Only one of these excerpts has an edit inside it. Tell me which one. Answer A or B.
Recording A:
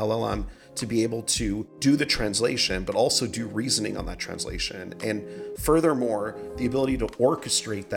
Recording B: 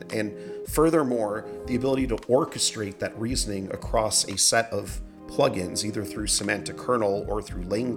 A